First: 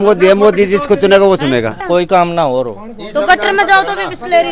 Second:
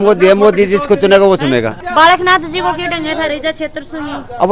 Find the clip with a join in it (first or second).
first